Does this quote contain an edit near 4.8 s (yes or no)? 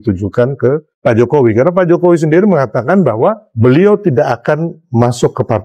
yes